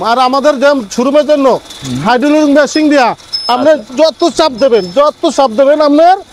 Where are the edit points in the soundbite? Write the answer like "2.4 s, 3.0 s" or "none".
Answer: none